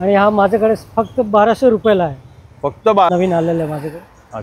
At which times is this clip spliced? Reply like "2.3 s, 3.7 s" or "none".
3.1 s